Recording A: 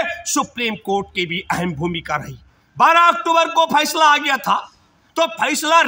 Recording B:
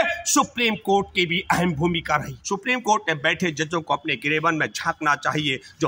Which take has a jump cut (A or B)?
B